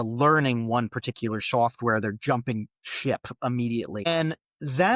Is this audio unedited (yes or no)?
no